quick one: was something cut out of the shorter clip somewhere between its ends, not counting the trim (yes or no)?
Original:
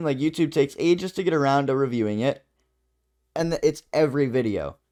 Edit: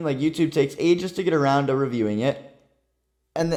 no